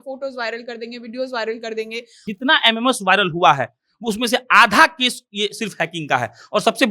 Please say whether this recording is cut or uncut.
cut